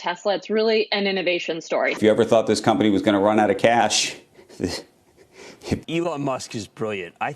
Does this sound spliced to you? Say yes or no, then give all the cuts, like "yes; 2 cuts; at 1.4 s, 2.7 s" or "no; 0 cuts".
yes; 2 cuts; at 2.0 s, 5.8 s